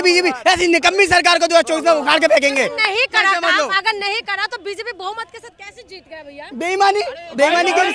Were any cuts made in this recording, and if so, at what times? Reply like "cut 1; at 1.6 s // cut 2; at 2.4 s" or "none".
none

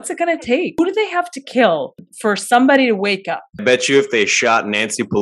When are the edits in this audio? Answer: cut 1; at 0.8 s // cut 2; at 2.1 s // cut 3; at 3.6 s

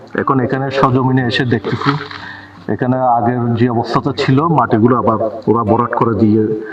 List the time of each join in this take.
none

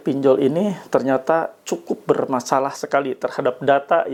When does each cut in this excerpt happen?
none

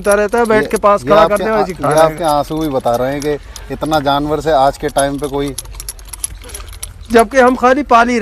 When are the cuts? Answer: none

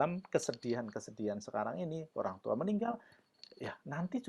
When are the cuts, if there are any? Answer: none

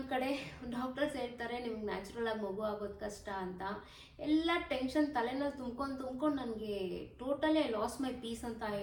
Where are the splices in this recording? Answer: none

